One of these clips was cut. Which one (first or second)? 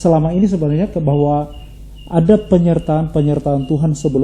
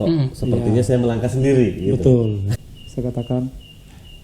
second